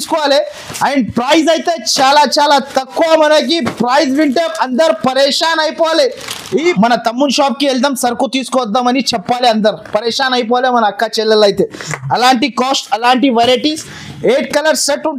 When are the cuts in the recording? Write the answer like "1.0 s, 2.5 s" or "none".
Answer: 6.8 s